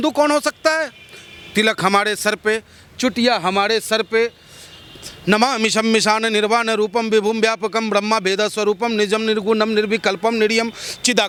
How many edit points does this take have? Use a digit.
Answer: 0